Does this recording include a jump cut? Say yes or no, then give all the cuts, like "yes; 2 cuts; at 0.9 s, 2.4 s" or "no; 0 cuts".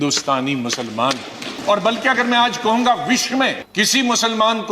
yes; 2 cuts; at 1.5 s, 3.6 s